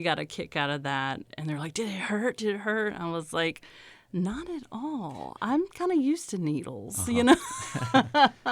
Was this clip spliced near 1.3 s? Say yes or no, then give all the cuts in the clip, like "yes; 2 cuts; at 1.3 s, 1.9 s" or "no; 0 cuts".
yes; 1 cut; at 1.3 s